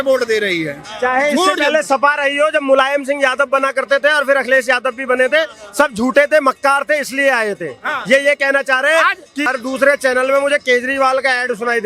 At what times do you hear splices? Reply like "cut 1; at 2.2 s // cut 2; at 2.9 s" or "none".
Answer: cut 1; at 9.5 s